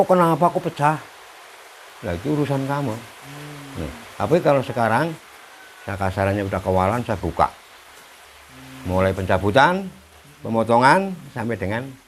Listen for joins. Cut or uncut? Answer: uncut